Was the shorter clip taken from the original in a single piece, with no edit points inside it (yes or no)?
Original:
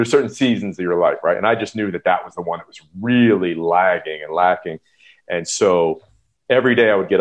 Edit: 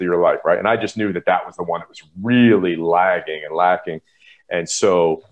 yes